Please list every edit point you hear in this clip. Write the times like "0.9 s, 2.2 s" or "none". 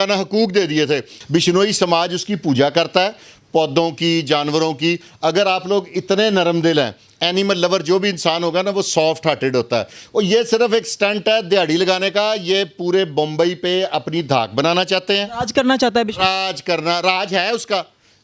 1.1 s